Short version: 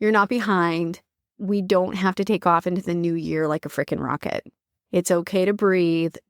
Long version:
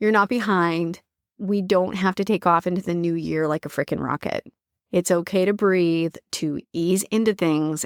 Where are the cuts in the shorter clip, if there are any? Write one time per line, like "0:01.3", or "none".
none